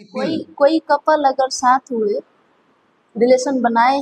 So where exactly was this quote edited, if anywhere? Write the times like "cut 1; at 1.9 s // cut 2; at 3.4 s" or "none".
none